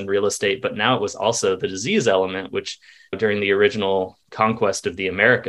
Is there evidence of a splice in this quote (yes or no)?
no